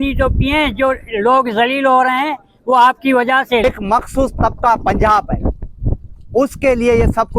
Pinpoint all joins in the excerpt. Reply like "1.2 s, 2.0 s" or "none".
3.6 s